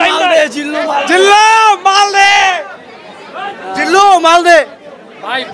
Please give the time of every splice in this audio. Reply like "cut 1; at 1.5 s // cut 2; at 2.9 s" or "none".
none